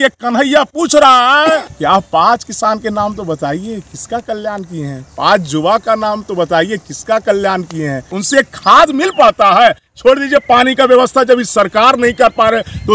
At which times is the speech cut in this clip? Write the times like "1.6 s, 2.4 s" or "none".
1.7 s, 8.1 s